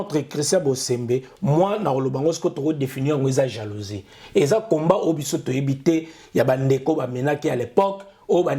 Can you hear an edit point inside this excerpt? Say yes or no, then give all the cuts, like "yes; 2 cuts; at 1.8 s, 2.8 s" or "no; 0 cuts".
no; 0 cuts